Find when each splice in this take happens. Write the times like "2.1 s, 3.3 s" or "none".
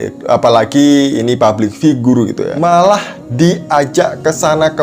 2.5 s